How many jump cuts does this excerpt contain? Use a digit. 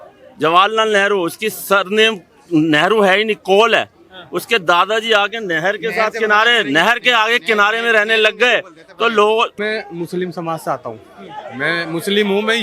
1